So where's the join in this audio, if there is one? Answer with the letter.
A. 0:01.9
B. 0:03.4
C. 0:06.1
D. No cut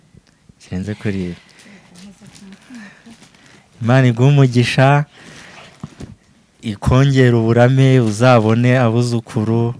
D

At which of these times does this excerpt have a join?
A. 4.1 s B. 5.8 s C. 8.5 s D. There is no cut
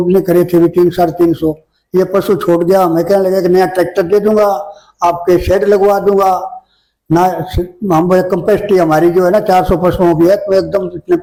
D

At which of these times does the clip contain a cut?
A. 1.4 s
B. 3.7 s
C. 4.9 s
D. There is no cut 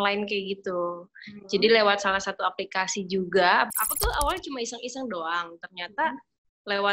B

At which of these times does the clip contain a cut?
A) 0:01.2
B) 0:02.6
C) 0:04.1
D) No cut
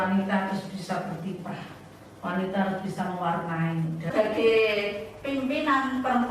C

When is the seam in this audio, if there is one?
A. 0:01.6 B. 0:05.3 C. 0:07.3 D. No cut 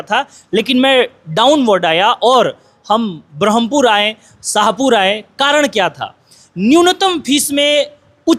D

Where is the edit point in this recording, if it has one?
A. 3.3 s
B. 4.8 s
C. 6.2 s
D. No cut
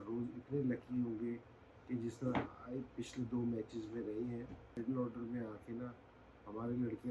B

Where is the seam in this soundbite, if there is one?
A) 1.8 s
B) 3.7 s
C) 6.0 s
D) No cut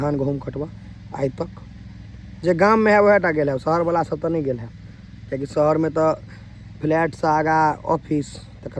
D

